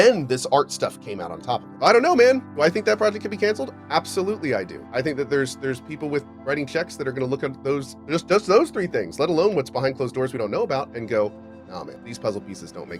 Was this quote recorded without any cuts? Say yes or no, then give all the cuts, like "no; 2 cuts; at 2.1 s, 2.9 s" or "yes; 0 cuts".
no; 3 cuts; at 1.7 s, 4.8 s, 12.0 s